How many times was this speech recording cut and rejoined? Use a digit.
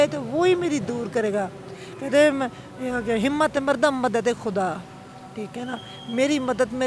0